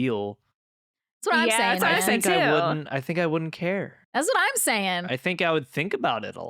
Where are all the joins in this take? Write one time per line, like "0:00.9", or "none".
0:05.0